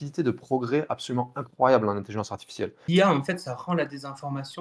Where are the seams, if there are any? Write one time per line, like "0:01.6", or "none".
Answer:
0:02.8